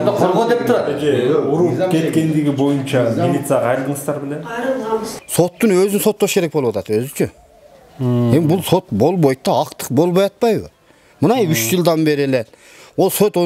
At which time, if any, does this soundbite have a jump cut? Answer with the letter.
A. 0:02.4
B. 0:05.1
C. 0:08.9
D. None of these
B